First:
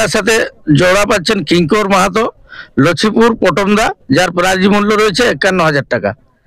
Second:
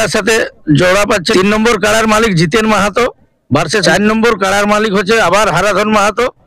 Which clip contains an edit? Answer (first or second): second